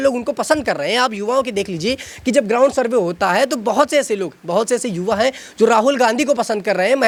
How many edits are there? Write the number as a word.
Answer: zero